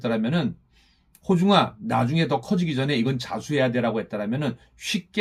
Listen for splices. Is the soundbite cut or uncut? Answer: uncut